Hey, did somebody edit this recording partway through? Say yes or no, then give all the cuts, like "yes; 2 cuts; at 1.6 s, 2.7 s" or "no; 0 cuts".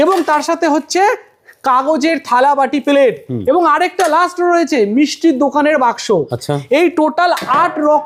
no; 0 cuts